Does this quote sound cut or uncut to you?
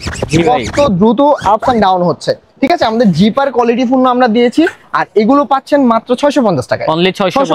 uncut